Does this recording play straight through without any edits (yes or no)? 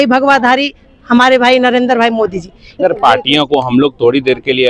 no